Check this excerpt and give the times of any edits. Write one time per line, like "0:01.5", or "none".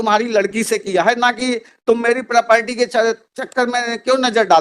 none